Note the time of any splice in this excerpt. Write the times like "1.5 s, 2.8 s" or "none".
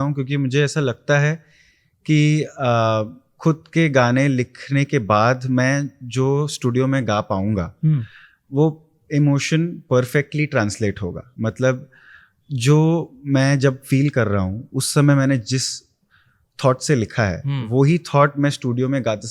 none

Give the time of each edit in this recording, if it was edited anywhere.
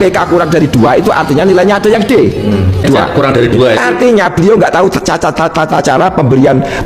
2.8 s

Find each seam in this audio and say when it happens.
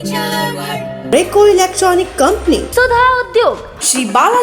1.0 s

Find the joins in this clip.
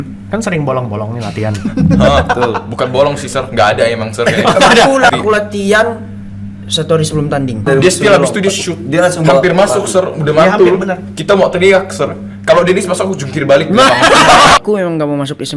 5.1 s, 7.7 s, 14.6 s

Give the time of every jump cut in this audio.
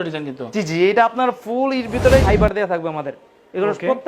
2.2 s

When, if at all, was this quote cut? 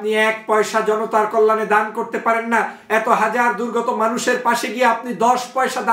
none

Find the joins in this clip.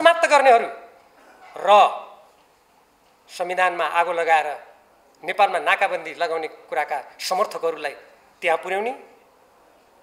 none

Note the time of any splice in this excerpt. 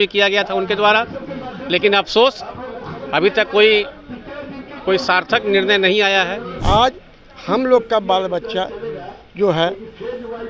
6.5 s

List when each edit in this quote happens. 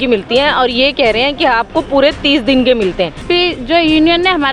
3.2 s

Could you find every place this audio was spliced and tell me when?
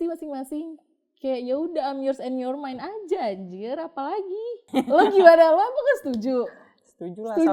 4.6 s

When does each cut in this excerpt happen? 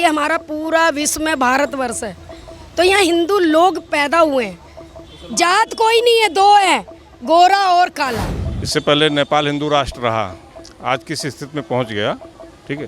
8.3 s

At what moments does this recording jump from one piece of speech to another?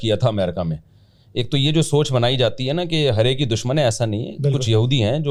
none

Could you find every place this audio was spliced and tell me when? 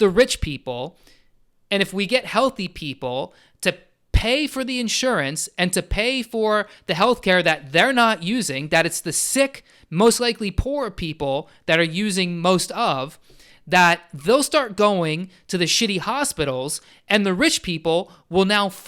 none

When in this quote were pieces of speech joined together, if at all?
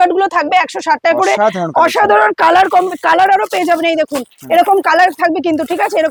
none

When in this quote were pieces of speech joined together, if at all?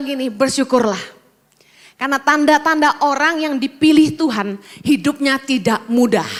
none

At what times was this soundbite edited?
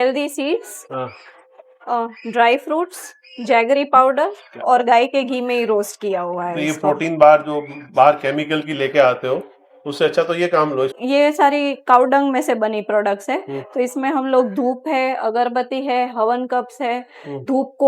10.9 s

